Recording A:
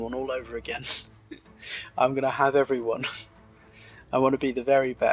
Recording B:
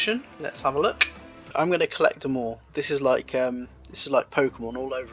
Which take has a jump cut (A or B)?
B